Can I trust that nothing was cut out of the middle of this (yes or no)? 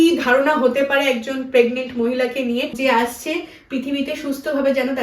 no